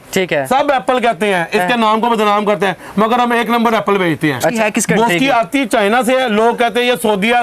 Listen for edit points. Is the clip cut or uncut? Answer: cut